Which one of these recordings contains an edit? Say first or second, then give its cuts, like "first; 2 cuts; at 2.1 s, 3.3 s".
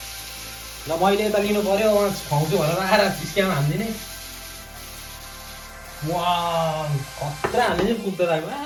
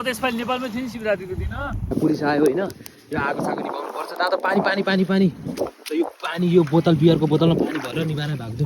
second; 1 cut; at 1.8 s